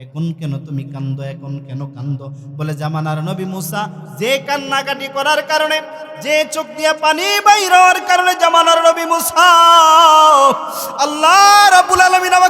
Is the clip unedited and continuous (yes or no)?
yes